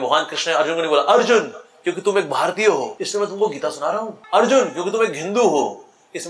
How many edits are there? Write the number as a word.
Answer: two